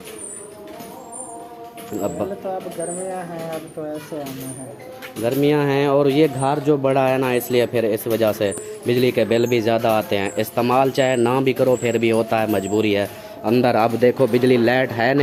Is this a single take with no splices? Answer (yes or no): yes